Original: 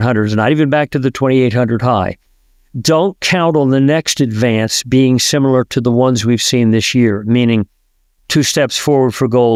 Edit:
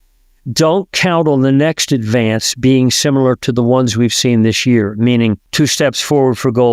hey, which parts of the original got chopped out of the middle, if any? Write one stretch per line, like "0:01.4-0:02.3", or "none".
0:07.7-0:08.2